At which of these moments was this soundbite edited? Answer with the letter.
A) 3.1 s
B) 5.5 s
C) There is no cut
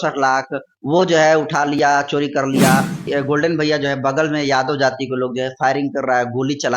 A